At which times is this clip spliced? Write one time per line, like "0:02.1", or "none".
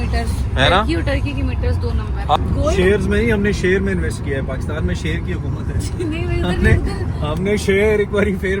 0:02.4